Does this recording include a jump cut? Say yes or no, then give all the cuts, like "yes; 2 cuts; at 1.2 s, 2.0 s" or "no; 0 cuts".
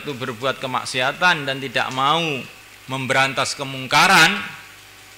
no; 0 cuts